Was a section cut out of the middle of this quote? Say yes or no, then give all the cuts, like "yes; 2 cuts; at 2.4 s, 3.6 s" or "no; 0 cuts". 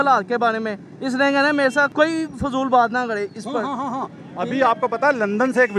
no; 0 cuts